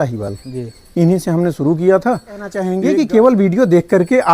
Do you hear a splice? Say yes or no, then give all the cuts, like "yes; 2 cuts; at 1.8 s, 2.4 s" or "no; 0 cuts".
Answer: yes; 1 cut; at 2.6 s